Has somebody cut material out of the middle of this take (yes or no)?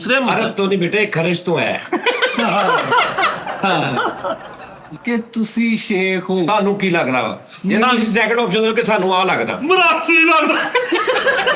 yes